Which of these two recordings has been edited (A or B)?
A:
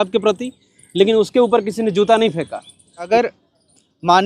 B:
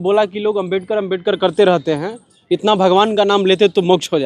A